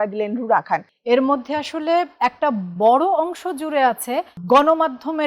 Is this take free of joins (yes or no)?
no